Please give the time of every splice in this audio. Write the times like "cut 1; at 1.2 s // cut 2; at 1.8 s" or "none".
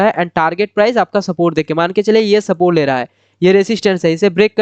none